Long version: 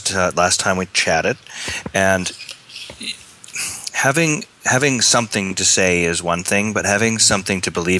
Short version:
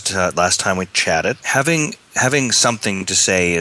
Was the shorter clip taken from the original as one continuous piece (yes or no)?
no